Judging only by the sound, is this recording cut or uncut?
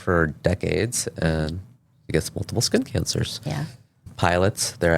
cut